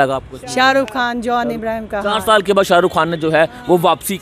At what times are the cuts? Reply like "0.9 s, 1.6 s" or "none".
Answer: none